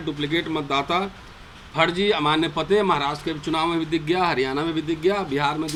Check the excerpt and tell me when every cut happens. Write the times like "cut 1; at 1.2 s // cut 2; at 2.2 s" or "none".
none